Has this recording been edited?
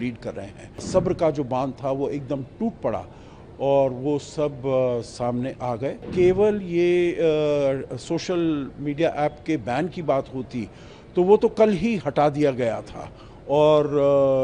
yes; 2 cuts; at 0.8 s, 6.1 s

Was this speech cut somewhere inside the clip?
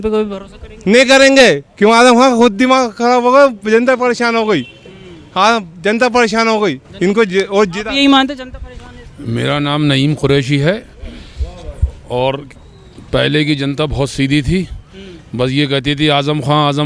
no; 0 cuts

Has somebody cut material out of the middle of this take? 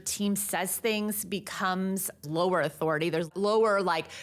yes; 2 cuts; at 2.2 s, 3.3 s

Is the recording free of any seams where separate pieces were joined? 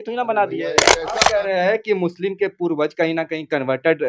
no; 1 cut; at 1.0 s

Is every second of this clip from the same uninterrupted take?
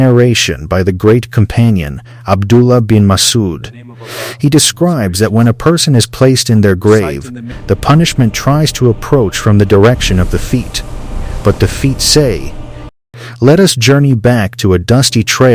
no; 1 cut; at 12.8 s

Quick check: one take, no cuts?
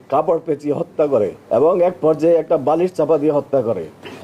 no; 1 cut; at 1.4 s

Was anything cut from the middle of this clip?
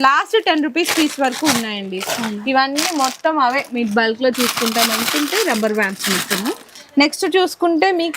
no; 0 cuts

